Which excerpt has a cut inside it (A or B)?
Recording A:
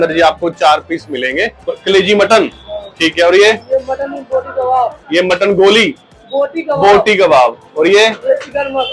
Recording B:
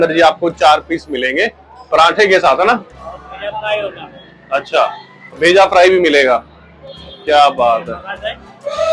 A